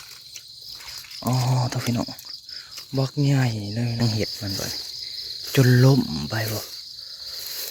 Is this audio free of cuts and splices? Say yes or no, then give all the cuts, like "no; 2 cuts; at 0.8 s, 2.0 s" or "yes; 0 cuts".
no; 1 cut; at 4.0 s